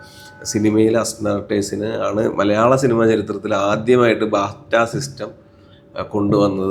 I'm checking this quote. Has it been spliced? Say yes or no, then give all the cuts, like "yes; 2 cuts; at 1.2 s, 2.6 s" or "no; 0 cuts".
no; 0 cuts